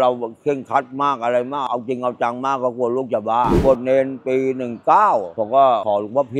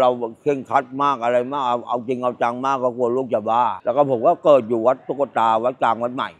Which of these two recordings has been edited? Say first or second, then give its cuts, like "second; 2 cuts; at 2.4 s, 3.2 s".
first; 2 cuts; at 1.6 s, 3.6 s